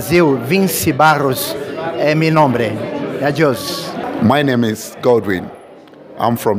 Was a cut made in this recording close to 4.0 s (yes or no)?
yes